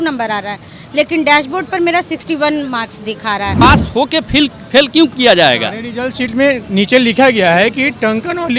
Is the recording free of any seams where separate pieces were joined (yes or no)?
no